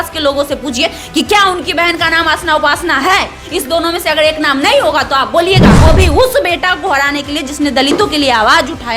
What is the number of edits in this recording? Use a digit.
1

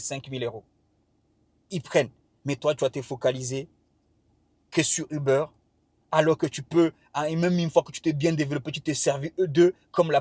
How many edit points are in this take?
0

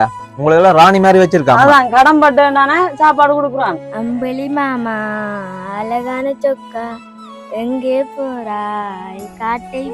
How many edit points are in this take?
1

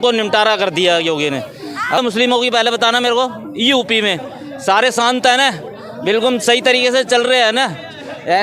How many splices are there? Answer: 1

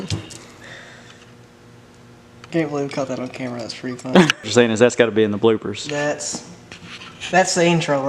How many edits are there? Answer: 2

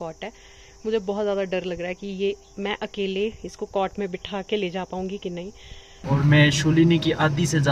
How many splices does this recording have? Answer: 1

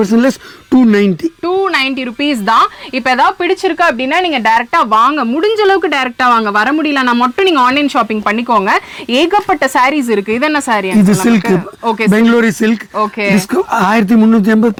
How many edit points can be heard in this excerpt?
0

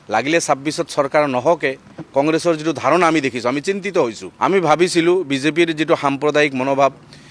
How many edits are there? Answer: 1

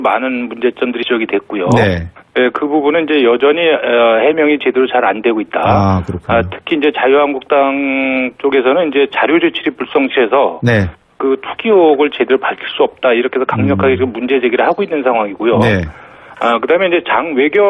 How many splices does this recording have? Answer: 1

